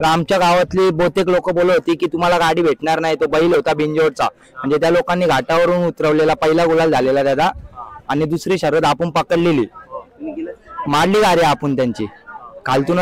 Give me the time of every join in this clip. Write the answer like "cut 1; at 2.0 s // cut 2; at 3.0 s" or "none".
none